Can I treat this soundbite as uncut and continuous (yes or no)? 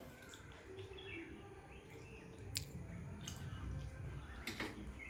yes